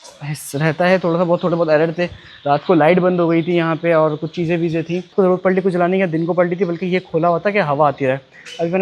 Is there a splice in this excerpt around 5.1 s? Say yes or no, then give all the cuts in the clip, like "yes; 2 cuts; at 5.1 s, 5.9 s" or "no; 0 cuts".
yes; 1 cut; at 5.1 s